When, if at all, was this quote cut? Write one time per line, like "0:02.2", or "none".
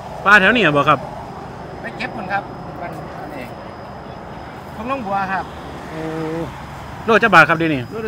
none